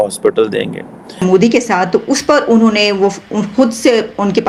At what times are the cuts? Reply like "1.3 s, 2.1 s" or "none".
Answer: 1.2 s